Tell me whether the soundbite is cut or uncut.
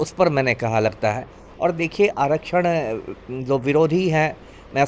uncut